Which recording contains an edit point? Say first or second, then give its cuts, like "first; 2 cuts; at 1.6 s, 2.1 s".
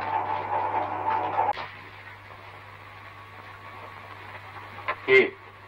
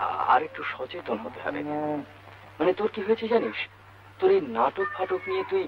first; 1 cut; at 1.5 s